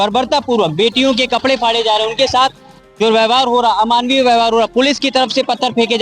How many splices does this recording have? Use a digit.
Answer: 0